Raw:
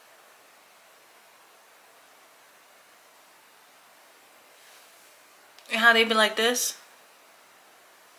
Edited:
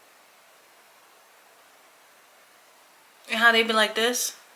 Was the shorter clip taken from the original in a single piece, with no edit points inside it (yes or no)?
no